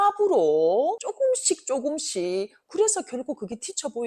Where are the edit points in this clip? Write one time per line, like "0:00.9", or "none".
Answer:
0:01.1
0:02.6